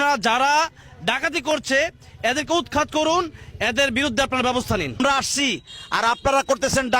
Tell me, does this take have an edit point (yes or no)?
yes